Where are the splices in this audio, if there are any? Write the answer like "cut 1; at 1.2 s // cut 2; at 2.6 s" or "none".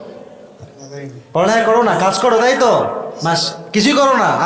none